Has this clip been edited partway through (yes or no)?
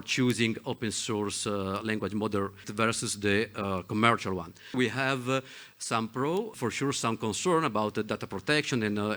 yes